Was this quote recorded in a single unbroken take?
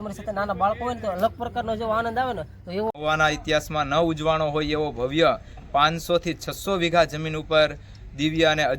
no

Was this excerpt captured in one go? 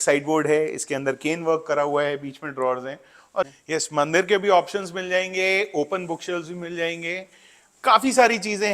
no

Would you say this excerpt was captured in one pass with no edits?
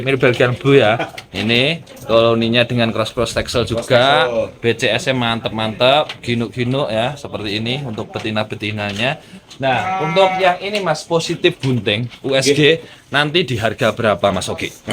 yes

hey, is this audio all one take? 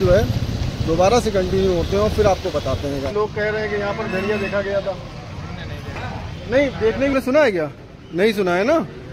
no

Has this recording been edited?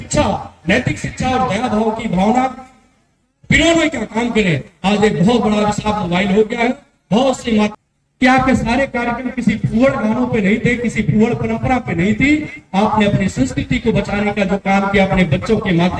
yes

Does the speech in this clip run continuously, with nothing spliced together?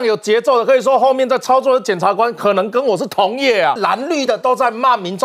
no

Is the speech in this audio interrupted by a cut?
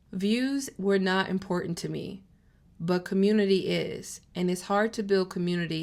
no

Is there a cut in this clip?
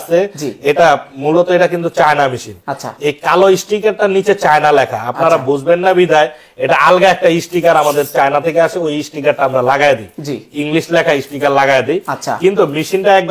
no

